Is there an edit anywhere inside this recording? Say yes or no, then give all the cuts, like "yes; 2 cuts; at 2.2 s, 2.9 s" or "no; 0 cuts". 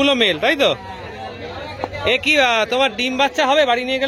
no; 0 cuts